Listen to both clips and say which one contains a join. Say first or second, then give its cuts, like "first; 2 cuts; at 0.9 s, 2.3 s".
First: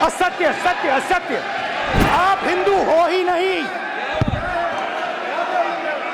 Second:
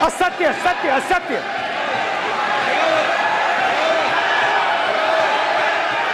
first; 1 cut; at 2.0 s